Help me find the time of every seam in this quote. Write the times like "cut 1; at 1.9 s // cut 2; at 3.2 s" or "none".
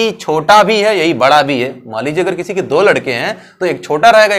none